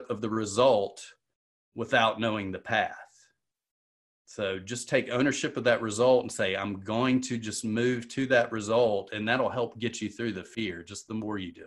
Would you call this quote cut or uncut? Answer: cut